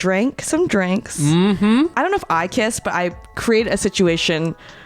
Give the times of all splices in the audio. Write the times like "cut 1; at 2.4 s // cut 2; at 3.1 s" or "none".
cut 1; at 1.9 s